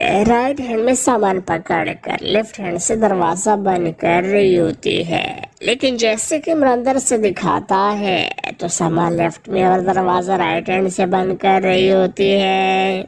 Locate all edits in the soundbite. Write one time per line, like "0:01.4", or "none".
none

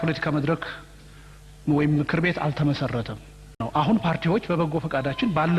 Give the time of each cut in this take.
0:03.6

